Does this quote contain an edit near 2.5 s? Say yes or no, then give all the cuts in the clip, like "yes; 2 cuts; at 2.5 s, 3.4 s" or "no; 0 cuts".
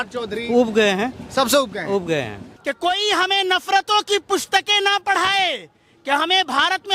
yes; 1 cut; at 2.5 s